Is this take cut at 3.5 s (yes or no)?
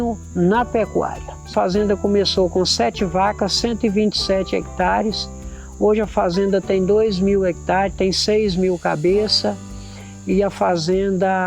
no